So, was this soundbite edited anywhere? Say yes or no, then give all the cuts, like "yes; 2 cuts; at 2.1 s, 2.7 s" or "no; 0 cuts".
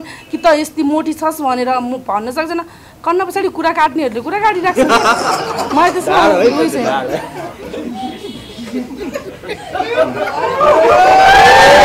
no; 0 cuts